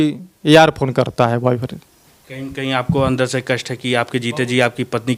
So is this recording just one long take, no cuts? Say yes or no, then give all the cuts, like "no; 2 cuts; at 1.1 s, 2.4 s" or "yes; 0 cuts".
yes; 0 cuts